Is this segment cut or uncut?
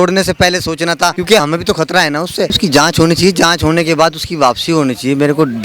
cut